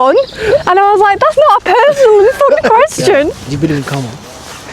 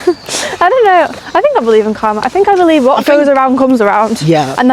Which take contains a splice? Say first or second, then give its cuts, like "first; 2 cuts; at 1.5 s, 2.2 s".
first; 1 cut; at 3.4 s